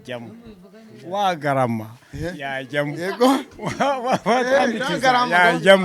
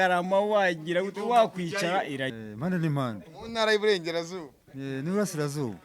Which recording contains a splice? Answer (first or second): second